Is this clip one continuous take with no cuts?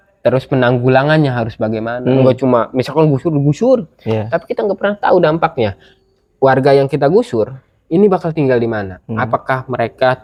yes; 0 cuts

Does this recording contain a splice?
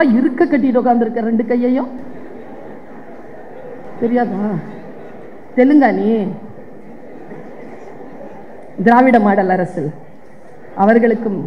no; 0 cuts

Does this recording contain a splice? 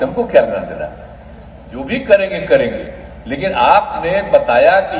no; 0 cuts

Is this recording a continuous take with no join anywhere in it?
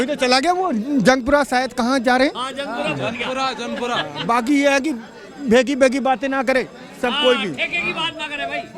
yes; 0 cuts

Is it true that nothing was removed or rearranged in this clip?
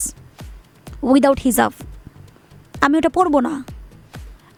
yes; 0 cuts

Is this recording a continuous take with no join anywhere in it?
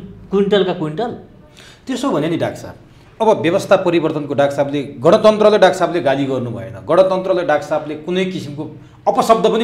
yes; 0 cuts

